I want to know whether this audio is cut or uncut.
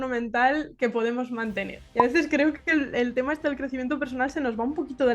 cut